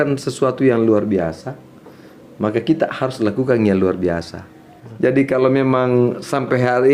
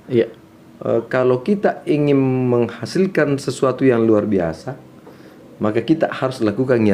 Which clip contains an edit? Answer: first; 1 cut; at 4.8 s

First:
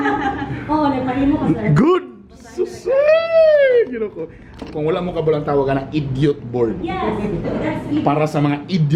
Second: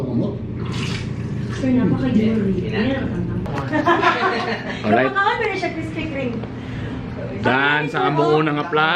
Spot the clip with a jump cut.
second; 1 cut; at 3.5 s

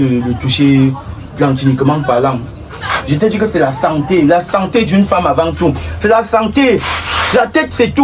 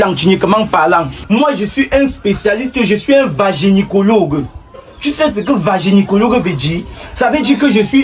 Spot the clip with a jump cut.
second; 1 cut; at 1.1 s

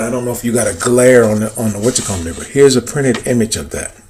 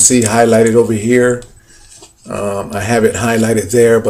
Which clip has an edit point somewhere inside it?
second; 1 cut; at 2.4 s

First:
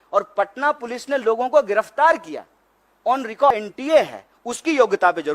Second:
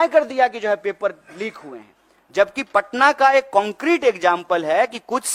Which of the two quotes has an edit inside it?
first; 1 cut; at 3.5 s

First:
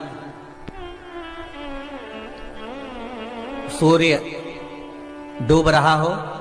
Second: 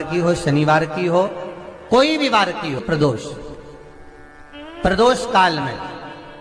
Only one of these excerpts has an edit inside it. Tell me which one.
second; 1 cut; at 2.8 s

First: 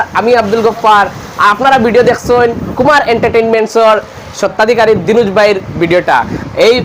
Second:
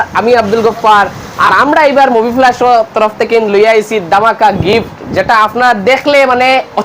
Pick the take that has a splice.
second; 1 cut; at 1.4 s

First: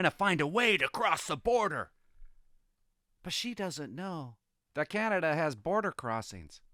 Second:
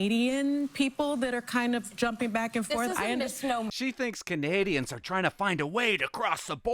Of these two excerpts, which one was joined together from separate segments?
second; 1 cut; at 3.7 s

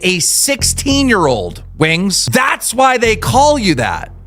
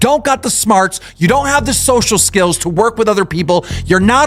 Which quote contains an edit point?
first; 1 cut; at 2.2 s

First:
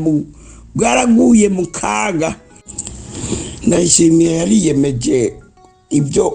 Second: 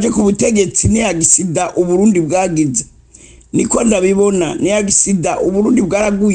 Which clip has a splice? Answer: first; 1 cut; at 2.7 s

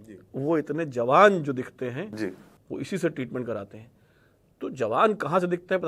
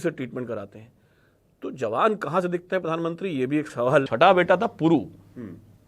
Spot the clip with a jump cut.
second; 1 cut; at 4.0 s

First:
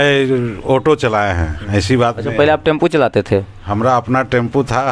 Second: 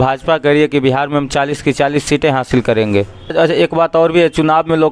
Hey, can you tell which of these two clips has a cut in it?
second; 1 cut; at 3.3 s

